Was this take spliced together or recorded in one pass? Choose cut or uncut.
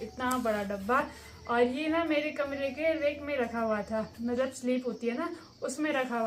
uncut